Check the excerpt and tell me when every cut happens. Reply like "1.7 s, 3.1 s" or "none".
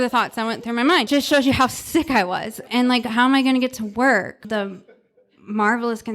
1.1 s, 2.7 s, 4.5 s